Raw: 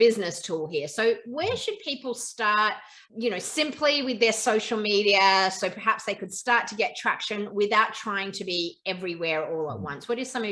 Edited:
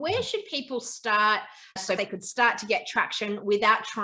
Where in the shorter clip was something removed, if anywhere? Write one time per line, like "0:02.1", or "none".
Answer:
0:01.9